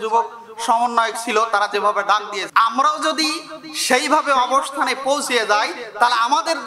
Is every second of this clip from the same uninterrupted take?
no; 1 cut; at 2.4 s

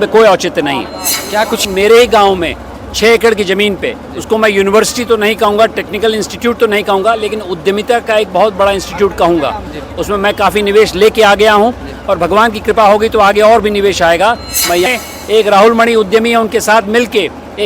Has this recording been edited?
yes; 2 cuts; at 1.6 s, 14.9 s

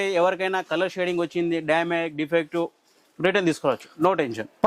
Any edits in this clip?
no; 0 cuts

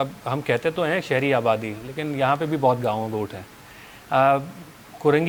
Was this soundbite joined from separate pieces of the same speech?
no; 0 cuts

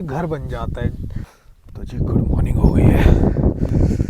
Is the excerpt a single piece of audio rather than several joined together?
no; 1 cut; at 1.4 s

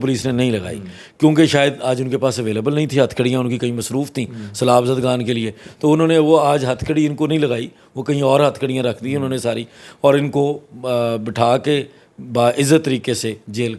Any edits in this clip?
no; 0 cuts

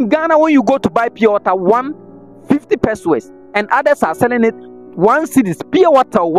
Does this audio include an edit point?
no; 0 cuts

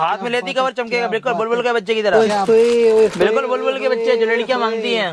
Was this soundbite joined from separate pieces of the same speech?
yes; 1 cut; at 2.1 s

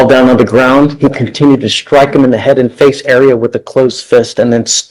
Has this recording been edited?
no; 0 cuts

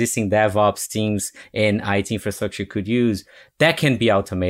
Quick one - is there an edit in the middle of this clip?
no; 0 cuts

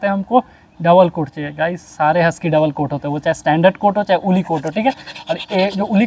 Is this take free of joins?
yes; 0 cuts

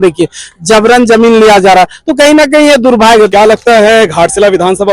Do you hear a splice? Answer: yes; 1 cut; at 3.3 s

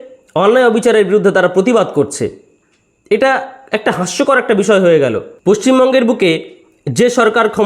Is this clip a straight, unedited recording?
no; 1 cut; at 5.3 s

